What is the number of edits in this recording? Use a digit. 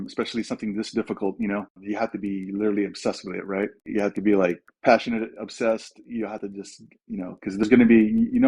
2